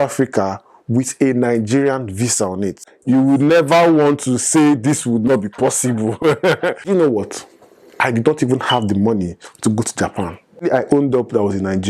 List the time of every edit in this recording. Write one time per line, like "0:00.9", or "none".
0:02.9
0:06.8
0:10.6